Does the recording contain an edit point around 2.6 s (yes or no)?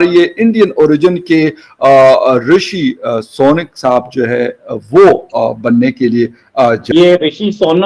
no